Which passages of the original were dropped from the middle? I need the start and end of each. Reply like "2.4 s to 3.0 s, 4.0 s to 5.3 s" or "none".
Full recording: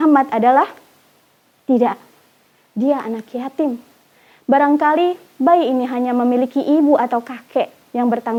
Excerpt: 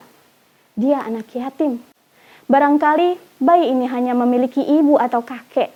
none